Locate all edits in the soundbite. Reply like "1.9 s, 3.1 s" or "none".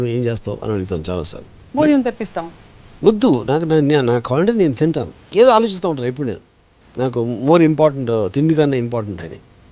5.1 s